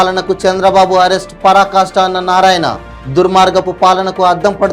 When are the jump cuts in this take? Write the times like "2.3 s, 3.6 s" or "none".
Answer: none